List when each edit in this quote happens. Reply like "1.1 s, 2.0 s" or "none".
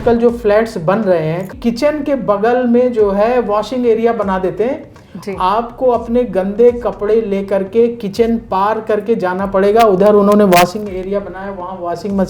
1.5 s